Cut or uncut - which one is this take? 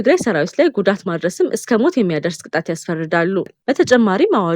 cut